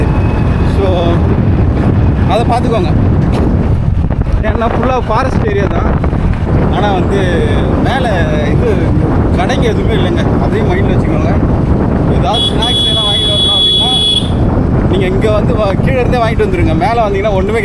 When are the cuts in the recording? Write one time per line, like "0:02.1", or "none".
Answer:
none